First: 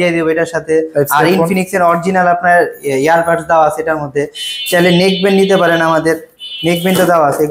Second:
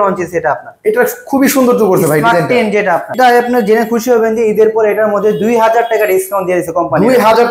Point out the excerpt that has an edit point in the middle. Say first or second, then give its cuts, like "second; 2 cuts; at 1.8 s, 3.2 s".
second; 1 cut; at 3.1 s